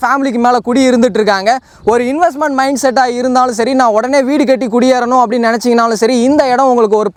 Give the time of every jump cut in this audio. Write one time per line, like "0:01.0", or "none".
none